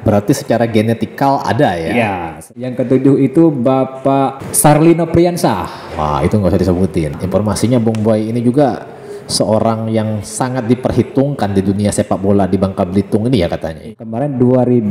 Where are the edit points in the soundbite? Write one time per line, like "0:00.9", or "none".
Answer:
0:02.5
0:04.4
0:07.2
0:13.8